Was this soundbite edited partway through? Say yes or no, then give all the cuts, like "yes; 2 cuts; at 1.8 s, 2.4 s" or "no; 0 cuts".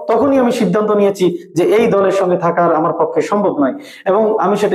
no; 0 cuts